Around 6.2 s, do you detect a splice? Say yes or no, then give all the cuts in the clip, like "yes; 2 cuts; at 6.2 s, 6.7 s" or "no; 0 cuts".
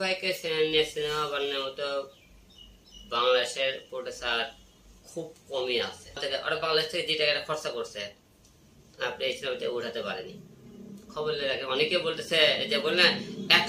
yes; 1 cut; at 6.2 s